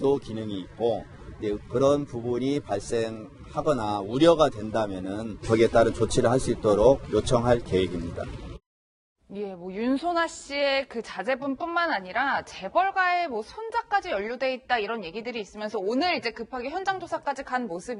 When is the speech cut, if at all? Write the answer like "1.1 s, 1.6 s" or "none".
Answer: 6.1 s